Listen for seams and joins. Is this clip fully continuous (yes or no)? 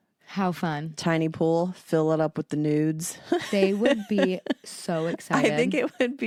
yes